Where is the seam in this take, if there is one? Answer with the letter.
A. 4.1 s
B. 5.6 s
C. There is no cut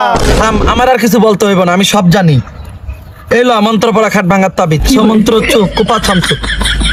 C